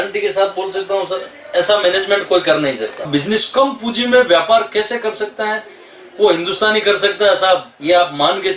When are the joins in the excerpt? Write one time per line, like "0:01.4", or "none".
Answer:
0:03.1